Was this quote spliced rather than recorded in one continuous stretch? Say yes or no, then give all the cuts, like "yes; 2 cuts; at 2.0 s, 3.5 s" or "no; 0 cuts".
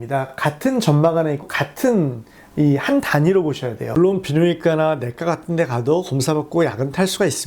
yes; 1 cut; at 3.7 s